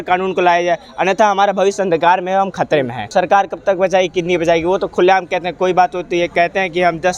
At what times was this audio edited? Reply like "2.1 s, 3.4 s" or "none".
3.1 s